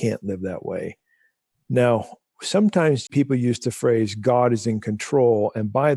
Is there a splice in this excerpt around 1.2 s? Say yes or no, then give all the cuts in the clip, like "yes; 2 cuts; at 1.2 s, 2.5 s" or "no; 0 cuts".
no; 1 cut; at 3.1 s